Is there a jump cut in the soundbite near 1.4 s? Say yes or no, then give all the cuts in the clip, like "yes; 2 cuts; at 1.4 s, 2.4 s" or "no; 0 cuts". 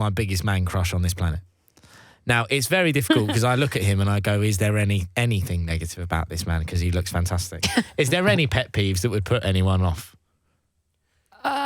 no; 0 cuts